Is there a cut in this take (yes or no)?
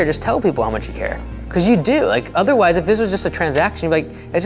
no